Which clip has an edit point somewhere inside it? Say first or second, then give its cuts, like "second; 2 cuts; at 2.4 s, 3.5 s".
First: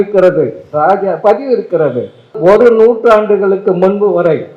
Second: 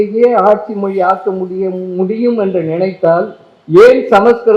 first; 1 cut; at 2.3 s